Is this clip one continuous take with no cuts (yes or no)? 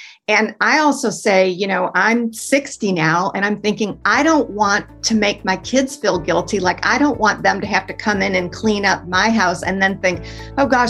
yes